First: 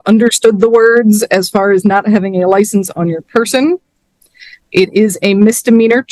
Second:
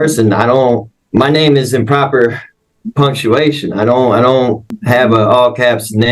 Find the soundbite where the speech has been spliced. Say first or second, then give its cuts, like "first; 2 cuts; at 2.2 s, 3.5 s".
second; 2 cuts; at 0.9 s, 4.8 s